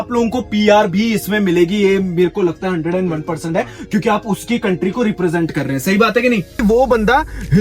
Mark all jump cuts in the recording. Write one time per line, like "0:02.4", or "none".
0:06.6